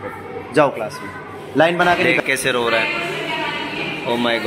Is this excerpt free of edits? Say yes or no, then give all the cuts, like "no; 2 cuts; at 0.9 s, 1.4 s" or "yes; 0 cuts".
no; 1 cut; at 2.1 s